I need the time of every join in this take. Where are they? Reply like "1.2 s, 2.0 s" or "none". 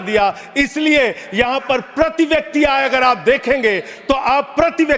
none